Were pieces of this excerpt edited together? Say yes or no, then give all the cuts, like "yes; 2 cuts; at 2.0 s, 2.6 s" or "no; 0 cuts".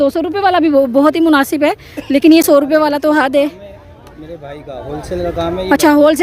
no; 0 cuts